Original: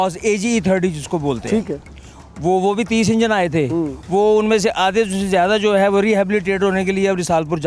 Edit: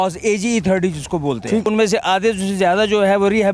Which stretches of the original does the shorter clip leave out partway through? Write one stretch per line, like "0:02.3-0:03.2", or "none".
0:01.7-0:04.4